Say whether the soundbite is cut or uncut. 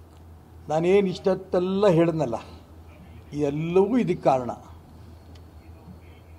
uncut